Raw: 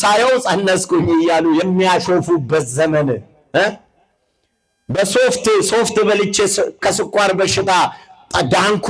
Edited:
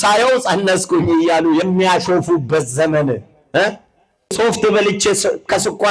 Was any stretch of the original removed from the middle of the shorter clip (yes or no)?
yes